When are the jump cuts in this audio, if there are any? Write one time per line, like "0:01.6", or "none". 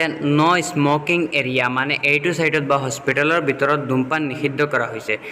none